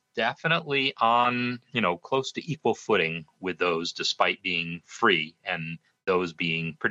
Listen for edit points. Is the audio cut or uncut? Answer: uncut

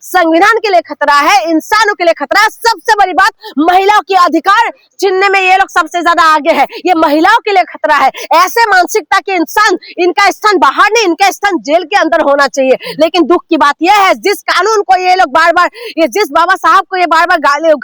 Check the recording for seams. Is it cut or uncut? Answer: uncut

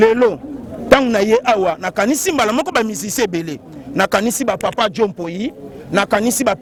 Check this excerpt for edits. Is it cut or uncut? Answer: uncut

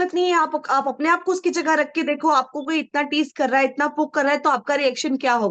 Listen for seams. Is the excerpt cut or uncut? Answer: uncut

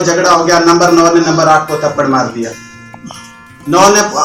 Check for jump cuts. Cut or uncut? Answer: uncut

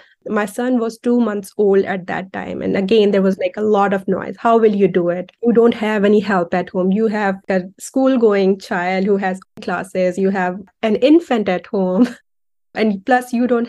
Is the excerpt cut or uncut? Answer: uncut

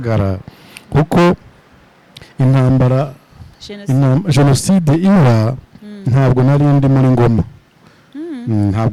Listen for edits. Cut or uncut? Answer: uncut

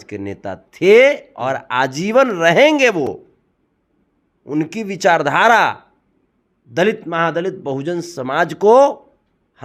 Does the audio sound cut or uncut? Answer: uncut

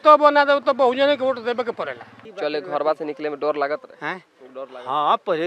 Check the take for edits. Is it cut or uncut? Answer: cut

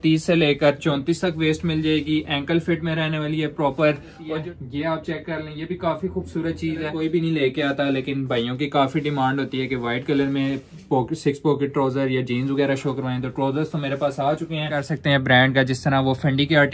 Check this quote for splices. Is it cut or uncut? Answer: cut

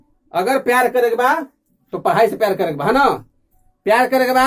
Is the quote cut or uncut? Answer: uncut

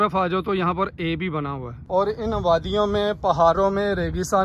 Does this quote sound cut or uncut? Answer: cut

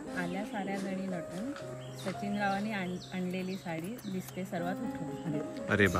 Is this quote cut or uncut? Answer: uncut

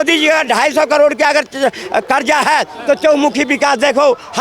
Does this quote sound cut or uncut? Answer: uncut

